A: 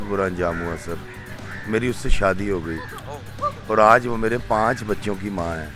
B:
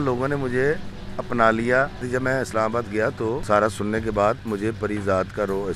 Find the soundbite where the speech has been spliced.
B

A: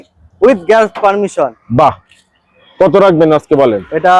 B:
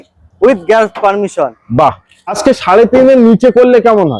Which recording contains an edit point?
B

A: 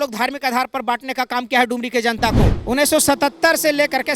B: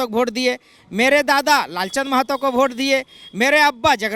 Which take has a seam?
A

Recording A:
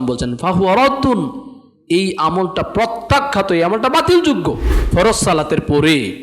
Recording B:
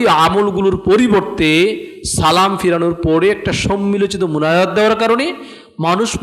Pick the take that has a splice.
A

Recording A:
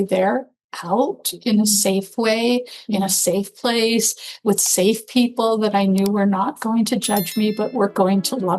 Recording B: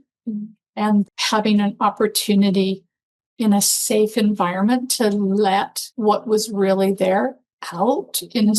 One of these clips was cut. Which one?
B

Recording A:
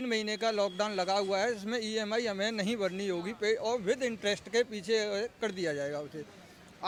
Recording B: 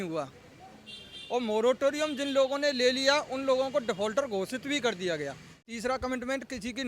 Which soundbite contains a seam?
B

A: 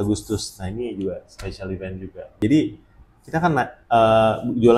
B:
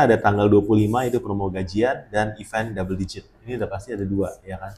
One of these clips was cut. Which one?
A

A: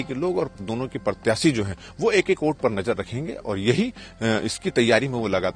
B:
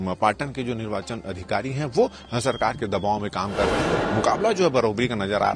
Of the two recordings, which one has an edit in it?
B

